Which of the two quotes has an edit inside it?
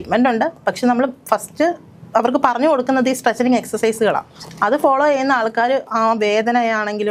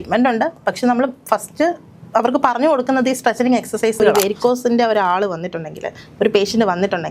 second; 1 cut; at 4.1 s

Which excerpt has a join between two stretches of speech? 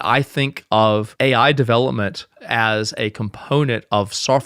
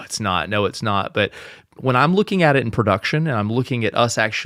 first; 1 cut; at 1.1 s

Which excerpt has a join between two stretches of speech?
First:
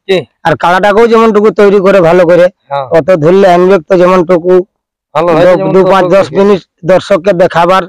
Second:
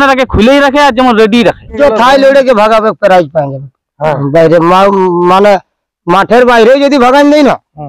second; 1 cut; at 1.8 s

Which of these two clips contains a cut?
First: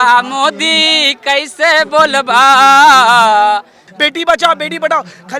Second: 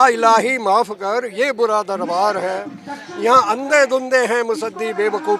first; 1 cut; at 3.9 s

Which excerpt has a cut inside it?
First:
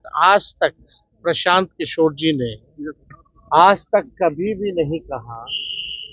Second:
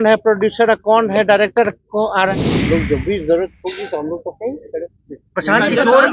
second; 1 cut; at 2.5 s

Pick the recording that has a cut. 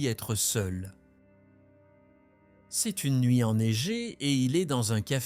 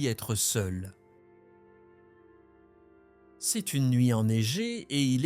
first; 2 cuts; at 0.9 s, 2.8 s

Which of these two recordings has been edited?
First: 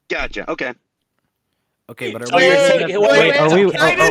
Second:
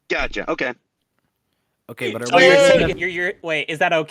second; 1 cut; at 2.9 s

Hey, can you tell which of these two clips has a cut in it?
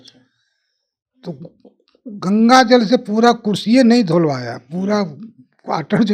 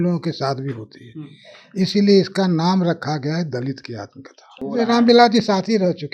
second; 1 cut; at 4.6 s

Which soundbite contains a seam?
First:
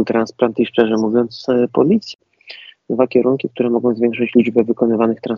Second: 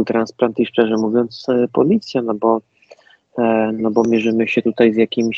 first; 1 cut; at 2.1 s

